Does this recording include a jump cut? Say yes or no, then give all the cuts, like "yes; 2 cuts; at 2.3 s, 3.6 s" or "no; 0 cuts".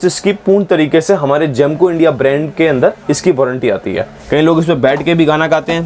yes; 1 cut; at 4.1 s